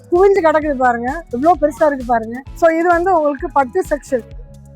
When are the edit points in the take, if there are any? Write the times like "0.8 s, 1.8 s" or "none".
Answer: 2.4 s